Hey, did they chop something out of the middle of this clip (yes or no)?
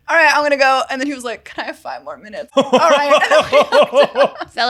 yes